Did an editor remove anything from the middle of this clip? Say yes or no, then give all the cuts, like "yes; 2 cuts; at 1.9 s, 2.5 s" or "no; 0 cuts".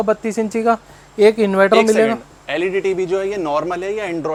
no; 0 cuts